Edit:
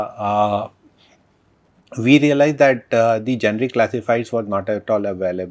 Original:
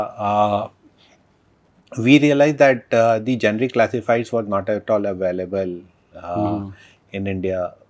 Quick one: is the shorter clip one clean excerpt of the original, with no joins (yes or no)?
yes